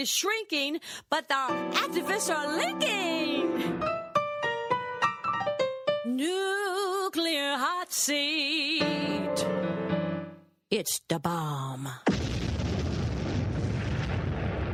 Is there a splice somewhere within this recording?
no; 0 cuts

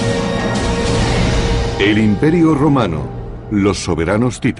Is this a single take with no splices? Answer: no; 1 cut; at 1.6 s

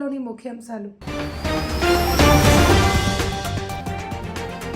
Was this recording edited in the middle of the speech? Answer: yes; 1 cut; at 1.0 s

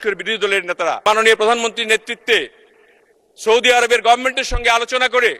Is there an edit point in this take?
yes; 1 cut; at 1.1 s

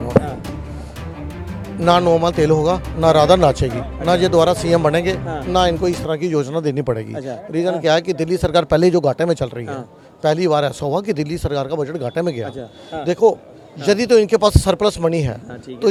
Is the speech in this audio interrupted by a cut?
no; 0 cuts

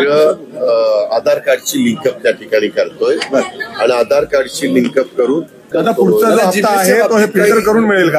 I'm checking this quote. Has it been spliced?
yes; 1 cut; at 5.7 s

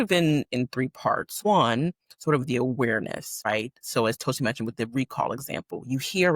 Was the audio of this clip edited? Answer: yes; 2 cuts; at 1.4 s, 3.5 s

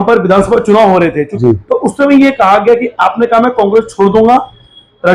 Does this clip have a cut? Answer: yes; 1 cut; at 1.3 s

